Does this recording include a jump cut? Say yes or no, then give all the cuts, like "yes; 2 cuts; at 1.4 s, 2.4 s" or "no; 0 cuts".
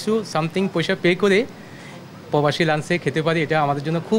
no; 0 cuts